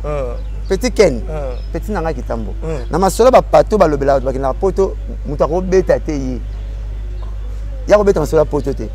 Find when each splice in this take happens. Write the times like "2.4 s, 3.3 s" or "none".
none